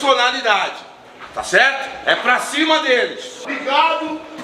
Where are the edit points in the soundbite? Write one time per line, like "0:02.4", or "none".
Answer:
0:03.3